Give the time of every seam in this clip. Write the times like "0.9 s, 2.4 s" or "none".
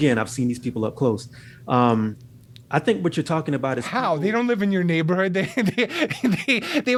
none